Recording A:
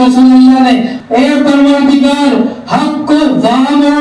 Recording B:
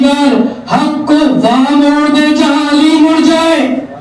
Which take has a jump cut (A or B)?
A